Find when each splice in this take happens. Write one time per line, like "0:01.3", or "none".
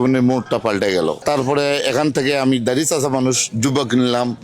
0:01.2